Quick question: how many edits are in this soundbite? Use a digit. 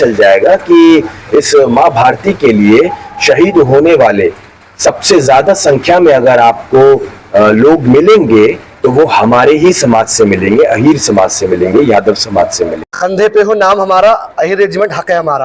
1